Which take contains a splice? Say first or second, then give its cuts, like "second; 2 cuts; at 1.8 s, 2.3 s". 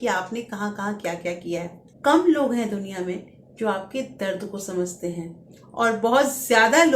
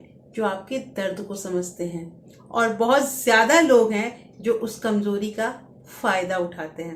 first; 1 cut; at 1.8 s